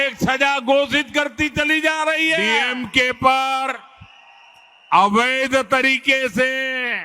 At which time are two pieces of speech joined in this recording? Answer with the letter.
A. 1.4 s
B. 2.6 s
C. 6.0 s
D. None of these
B